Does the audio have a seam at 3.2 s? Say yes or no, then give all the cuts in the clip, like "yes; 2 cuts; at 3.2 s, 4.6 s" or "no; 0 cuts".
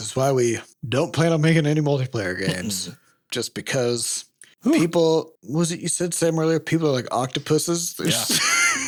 no; 0 cuts